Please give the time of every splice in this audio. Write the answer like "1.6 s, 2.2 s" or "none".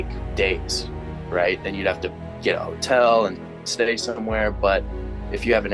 none